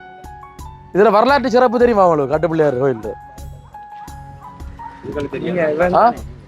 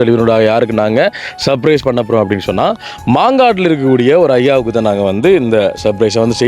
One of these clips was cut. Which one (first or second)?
first